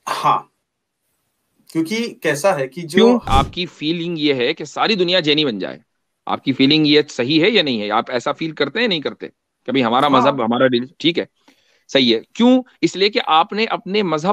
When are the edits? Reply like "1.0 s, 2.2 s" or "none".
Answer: 3.2 s